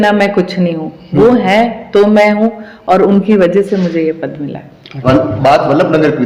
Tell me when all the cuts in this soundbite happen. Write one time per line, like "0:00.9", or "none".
none